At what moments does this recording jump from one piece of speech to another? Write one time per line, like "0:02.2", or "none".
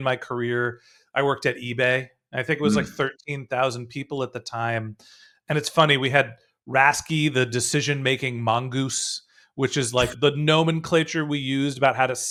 none